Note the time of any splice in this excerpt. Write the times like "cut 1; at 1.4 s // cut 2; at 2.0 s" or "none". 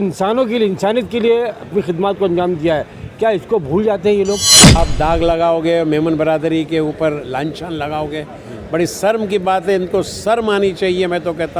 cut 1; at 4.7 s